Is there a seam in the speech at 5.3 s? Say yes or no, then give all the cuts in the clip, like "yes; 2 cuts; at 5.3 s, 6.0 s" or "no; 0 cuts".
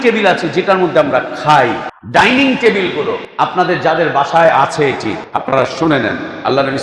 yes; 3 cuts; at 1.9 s, 3.3 s, 5.3 s